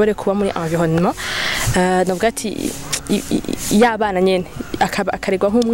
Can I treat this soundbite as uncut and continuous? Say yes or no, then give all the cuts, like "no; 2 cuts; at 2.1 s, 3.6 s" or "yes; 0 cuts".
yes; 0 cuts